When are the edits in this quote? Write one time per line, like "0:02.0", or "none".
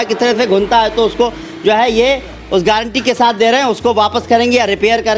none